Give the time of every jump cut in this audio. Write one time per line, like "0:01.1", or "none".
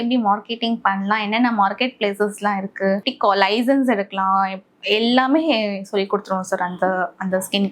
0:03.1